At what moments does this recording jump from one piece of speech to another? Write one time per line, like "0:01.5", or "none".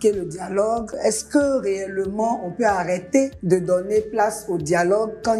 0:00.9
0:03.4